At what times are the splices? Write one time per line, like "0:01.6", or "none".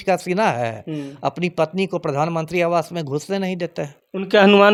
none